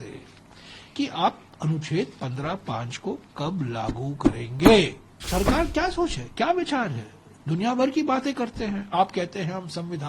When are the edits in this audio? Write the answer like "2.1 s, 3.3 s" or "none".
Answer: 5.2 s

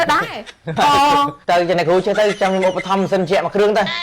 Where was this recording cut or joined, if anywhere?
1.3 s

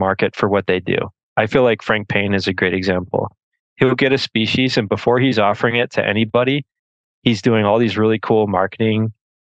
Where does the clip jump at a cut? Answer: 1.2 s

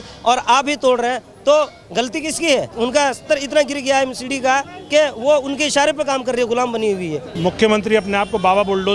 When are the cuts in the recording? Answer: 2.7 s, 7.3 s

